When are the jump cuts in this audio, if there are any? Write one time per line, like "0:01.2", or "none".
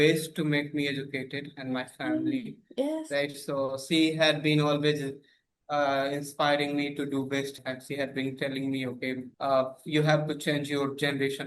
0:07.6
0:09.3